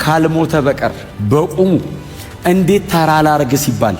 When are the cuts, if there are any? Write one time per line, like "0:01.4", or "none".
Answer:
0:01.1